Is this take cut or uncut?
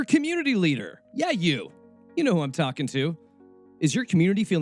cut